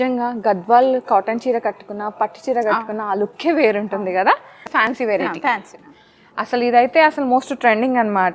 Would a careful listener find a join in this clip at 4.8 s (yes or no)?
yes